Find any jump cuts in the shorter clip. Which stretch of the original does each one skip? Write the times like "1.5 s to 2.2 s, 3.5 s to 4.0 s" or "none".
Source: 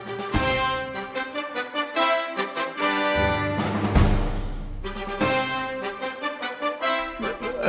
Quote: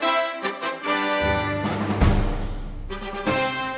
none